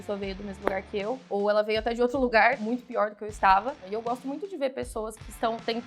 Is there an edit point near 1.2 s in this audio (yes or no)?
yes